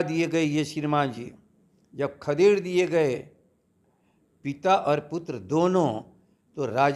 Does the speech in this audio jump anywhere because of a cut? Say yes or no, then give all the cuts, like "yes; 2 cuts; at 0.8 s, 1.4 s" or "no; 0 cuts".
no; 0 cuts